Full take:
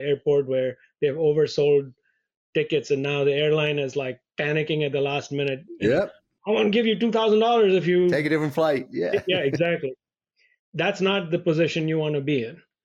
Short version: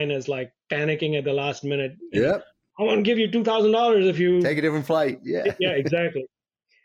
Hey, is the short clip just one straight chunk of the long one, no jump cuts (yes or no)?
yes